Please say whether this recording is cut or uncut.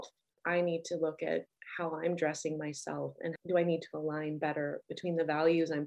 uncut